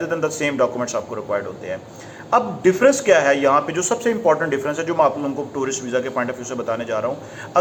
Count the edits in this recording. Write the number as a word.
zero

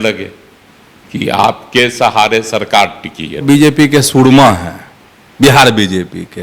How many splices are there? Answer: one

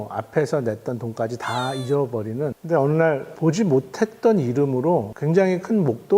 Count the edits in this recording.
three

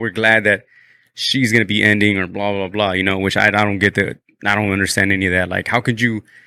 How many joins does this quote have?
zero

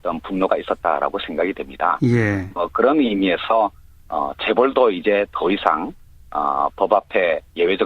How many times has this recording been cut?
one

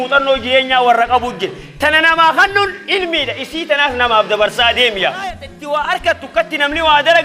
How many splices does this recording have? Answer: one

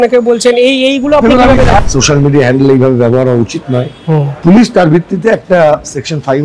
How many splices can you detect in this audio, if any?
two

